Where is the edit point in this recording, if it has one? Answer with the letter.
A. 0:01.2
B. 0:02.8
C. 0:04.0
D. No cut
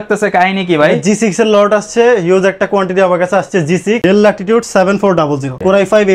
C